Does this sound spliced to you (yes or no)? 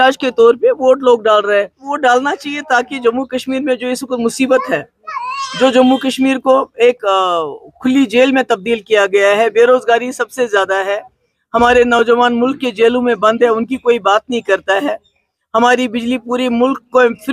yes